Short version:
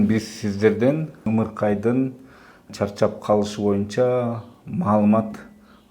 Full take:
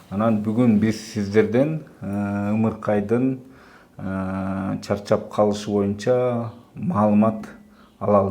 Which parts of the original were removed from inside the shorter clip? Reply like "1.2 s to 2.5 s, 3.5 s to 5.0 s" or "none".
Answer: 2.0 s to 2.5 s, 4.0 s to 4.8 s